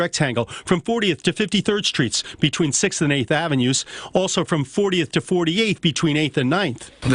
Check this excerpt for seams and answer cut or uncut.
uncut